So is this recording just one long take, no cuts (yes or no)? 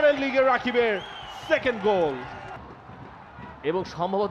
no